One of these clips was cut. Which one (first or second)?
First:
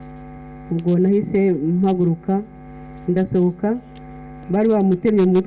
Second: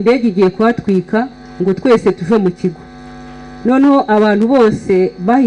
first